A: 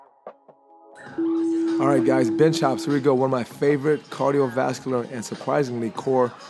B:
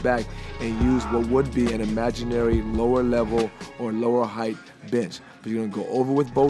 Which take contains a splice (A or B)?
A